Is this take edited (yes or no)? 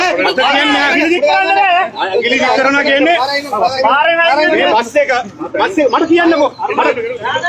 no